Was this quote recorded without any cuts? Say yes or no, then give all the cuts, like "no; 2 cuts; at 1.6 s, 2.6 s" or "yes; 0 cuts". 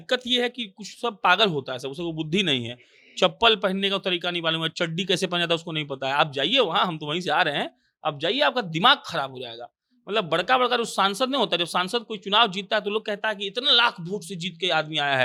yes; 0 cuts